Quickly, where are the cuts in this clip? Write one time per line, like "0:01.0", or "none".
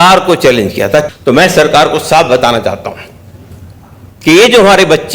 0:01.1